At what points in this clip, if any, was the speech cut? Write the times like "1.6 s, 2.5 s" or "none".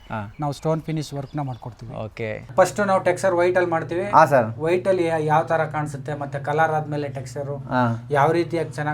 2.5 s

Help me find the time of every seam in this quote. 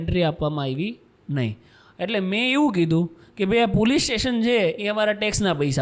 none

